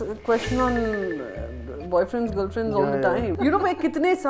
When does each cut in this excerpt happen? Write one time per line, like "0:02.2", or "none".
0:03.3